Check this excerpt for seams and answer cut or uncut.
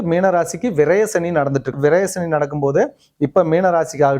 cut